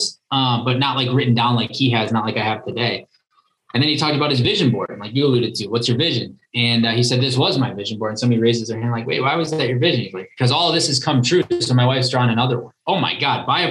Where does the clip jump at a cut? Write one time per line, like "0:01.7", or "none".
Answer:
0:12.7